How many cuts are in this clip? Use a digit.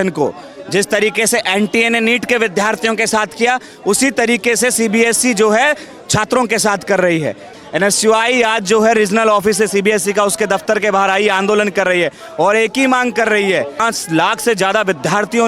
2